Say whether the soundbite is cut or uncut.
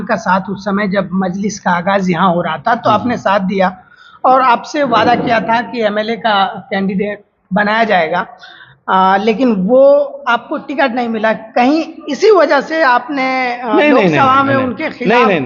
uncut